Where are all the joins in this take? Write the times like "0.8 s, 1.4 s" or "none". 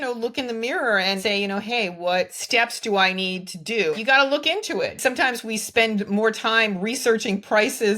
1.2 s, 2.4 s, 3.9 s, 5.0 s